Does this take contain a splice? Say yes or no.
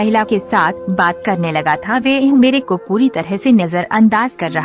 no